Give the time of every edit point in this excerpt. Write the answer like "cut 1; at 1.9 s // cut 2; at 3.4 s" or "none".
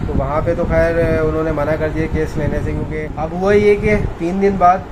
cut 1; at 3.1 s